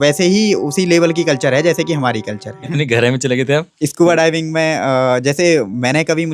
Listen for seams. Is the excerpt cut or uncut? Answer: cut